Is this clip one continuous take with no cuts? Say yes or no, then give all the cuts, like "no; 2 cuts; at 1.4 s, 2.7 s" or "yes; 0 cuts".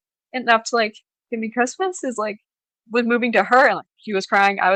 yes; 0 cuts